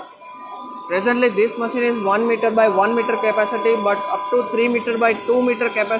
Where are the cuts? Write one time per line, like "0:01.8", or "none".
none